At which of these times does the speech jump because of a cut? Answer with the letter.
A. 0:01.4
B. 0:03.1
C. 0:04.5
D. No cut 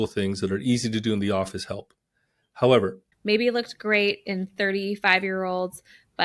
B